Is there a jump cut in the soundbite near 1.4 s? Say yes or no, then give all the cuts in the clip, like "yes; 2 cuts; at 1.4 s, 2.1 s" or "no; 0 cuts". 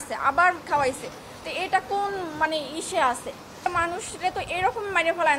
no; 1 cut; at 3.6 s